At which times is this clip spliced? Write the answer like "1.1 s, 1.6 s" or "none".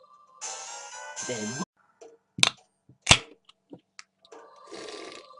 none